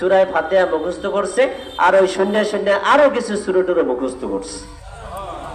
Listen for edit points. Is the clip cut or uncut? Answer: uncut